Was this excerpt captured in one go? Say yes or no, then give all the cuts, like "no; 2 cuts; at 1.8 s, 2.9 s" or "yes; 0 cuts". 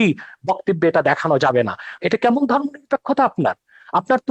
no; 1 cut; at 1.9 s